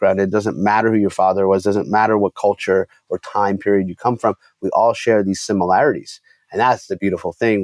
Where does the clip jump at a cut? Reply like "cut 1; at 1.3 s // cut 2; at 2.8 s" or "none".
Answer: none